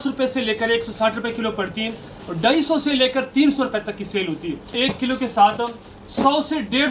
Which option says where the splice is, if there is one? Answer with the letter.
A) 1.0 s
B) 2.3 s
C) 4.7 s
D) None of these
C